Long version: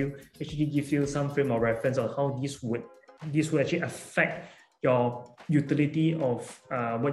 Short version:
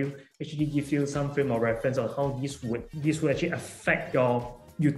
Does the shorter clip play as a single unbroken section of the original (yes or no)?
no